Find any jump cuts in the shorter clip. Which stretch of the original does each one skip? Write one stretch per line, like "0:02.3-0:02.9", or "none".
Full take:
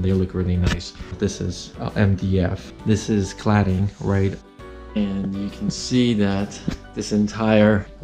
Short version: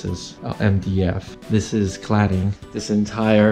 0:04.0-0:06.8